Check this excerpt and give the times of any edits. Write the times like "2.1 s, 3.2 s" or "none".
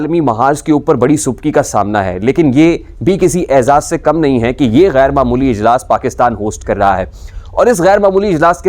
none